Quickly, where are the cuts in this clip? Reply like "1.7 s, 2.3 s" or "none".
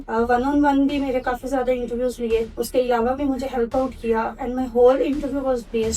none